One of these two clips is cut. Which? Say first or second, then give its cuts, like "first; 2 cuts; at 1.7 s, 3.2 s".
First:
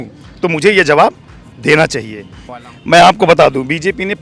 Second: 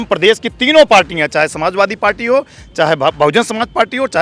first; 1 cut; at 2.4 s